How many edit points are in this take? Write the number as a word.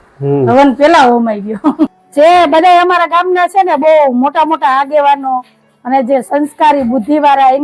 one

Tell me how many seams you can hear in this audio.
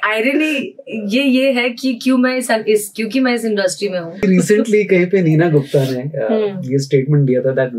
one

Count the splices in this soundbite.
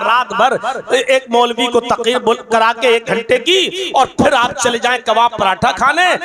zero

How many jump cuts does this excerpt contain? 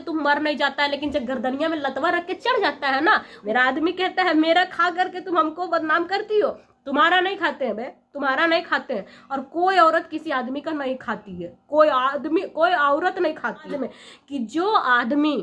two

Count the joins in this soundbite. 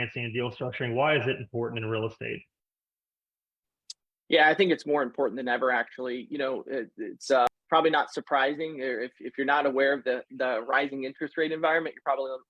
one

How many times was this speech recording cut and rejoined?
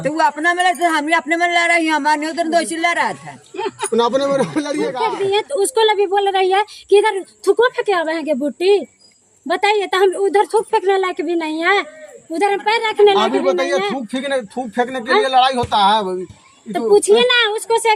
one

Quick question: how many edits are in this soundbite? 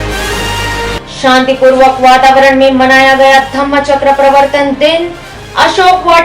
one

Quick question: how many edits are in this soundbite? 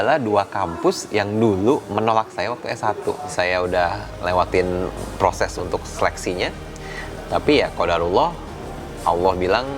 one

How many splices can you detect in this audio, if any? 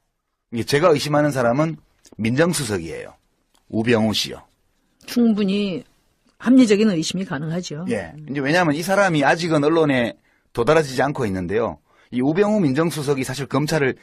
one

